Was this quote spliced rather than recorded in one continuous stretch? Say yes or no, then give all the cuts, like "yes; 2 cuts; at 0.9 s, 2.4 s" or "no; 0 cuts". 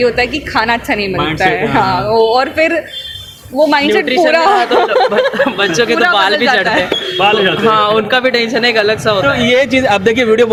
no; 0 cuts